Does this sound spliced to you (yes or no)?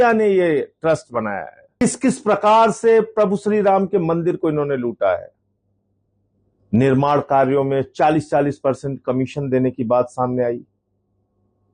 yes